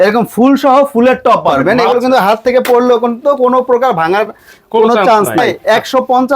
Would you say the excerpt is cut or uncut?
cut